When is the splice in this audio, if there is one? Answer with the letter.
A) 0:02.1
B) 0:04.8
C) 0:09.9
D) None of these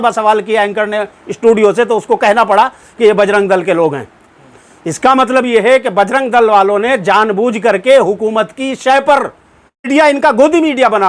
C